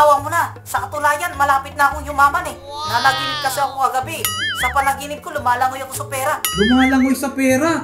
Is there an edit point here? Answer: yes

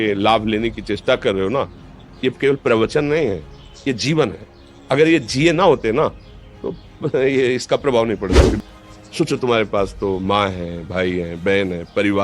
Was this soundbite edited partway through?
yes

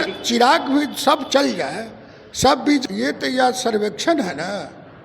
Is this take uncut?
no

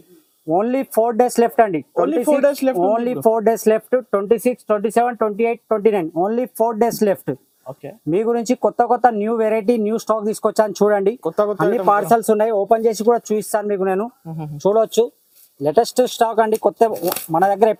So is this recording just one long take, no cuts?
yes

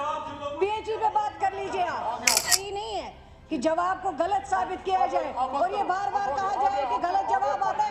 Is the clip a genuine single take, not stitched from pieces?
no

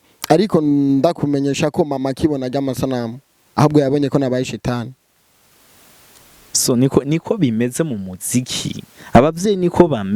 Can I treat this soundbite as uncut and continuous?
yes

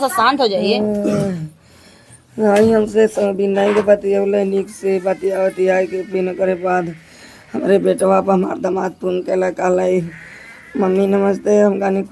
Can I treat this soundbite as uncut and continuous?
yes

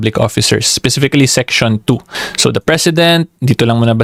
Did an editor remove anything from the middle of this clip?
no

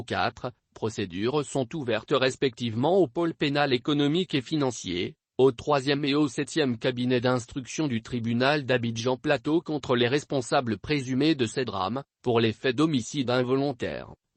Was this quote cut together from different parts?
no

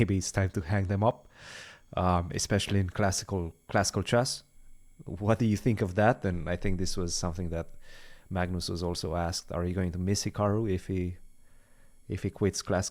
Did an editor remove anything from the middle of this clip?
no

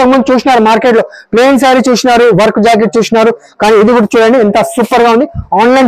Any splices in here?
no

